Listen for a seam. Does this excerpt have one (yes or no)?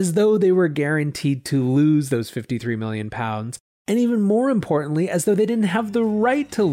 no